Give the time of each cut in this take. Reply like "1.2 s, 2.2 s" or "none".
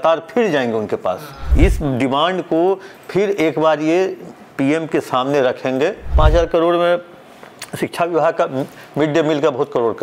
1.4 s, 6.0 s